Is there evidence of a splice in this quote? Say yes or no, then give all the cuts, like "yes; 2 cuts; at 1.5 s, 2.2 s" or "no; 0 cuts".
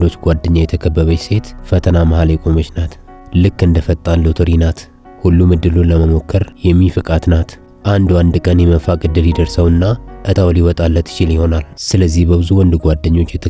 no; 0 cuts